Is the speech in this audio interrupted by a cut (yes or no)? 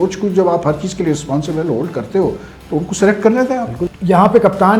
yes